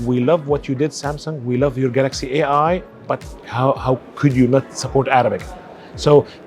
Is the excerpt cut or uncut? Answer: cut